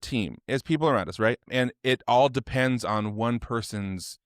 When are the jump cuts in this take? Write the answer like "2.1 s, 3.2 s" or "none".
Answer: 1.5 s

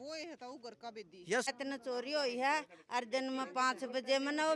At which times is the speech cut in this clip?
1.5 s

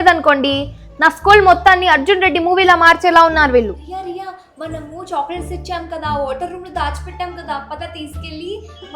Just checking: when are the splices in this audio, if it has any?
3.7 s

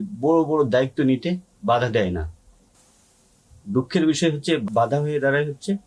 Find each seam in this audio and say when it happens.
4.6 s

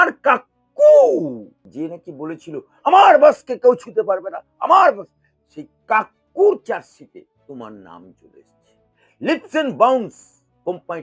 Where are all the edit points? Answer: 1.6 s, 7.3 s

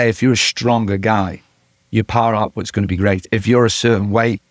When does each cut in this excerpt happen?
3.3 s

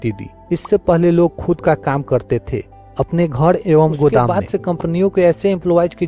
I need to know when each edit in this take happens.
4.3 s

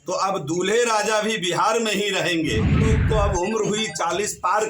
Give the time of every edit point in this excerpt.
2.9 s

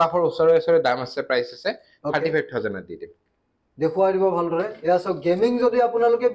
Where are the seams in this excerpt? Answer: none

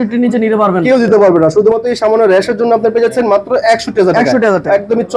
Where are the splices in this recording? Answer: none

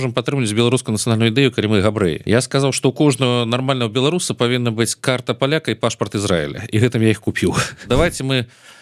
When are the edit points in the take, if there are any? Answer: 2.2 s, 7.8 s

